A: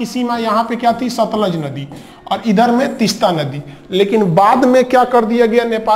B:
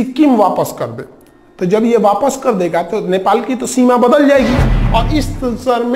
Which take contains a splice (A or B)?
B